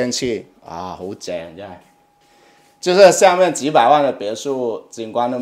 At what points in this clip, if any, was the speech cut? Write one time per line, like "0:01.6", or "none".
none